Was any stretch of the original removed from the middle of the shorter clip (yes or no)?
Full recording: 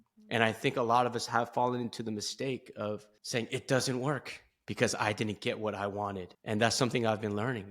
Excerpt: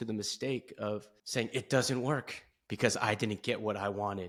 no